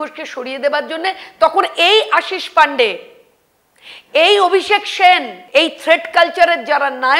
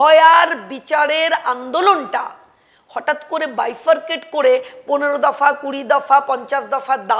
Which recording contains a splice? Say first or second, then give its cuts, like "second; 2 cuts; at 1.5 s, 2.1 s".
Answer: first; 1 cut; at 5.4 s